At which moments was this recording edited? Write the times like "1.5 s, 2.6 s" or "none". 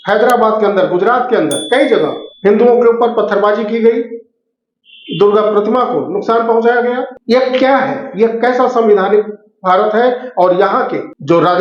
none